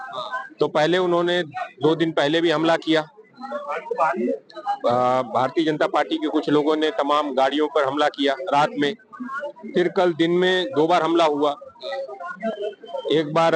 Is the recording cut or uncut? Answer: uncut